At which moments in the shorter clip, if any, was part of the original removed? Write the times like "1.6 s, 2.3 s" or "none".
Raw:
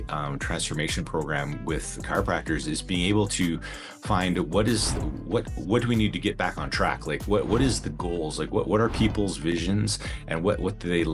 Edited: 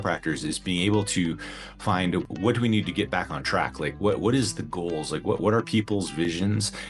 2.3 s